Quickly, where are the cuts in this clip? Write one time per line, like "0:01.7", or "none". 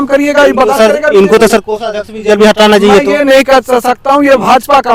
none